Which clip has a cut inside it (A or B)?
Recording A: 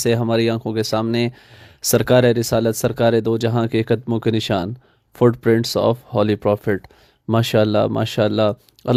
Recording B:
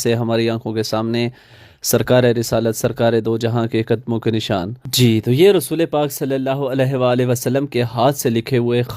B